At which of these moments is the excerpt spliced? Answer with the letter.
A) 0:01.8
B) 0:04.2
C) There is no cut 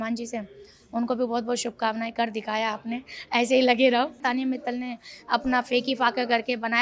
B